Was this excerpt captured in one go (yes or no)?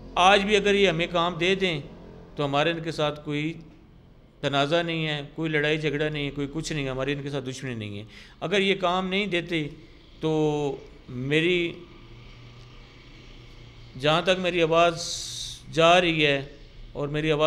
yes